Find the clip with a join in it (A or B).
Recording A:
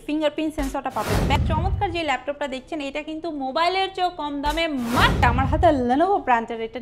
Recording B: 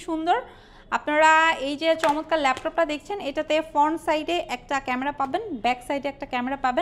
A